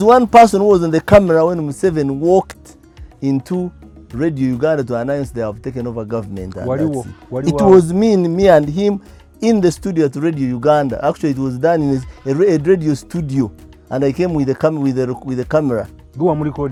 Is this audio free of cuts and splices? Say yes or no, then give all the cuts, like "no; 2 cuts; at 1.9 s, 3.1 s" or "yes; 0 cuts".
yes; 0 cuts